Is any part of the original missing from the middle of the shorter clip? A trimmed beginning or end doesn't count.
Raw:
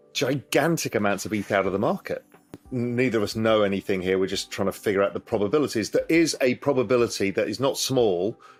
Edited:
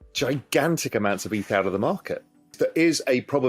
yes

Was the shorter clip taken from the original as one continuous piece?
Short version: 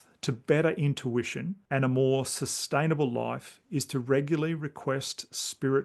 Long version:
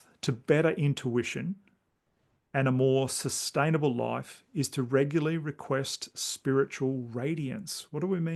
no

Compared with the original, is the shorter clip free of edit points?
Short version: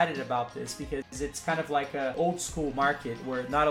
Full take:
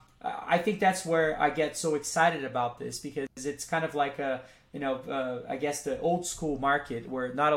no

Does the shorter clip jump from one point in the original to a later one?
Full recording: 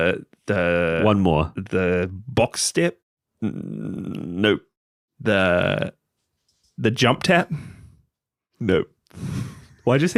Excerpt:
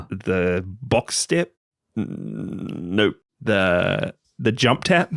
yes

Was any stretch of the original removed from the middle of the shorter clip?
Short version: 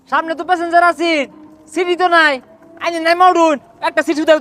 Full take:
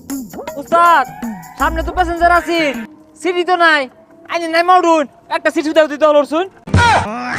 no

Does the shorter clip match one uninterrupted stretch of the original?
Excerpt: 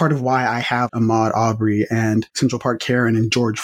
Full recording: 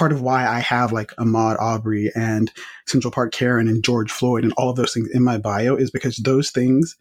no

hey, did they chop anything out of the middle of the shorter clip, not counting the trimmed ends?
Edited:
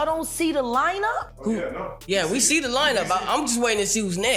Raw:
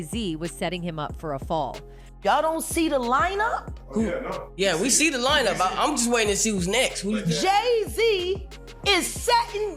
yes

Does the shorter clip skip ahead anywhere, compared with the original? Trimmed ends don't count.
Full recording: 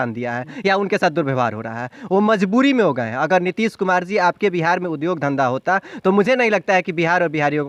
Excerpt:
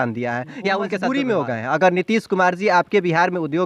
yes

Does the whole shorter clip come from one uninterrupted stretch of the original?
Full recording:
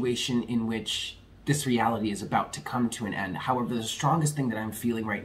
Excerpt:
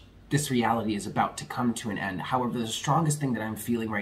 yes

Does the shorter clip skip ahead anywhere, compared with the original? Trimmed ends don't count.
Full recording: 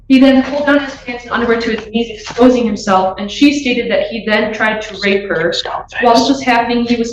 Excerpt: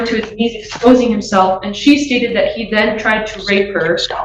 no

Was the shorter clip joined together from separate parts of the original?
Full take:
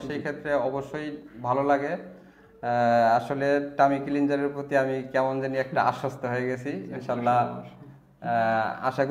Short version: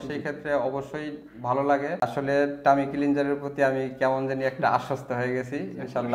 yes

